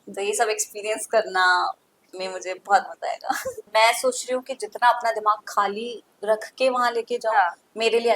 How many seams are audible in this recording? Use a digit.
1